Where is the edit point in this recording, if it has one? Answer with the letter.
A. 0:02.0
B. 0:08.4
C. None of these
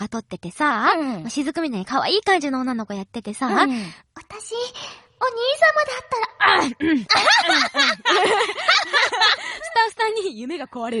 B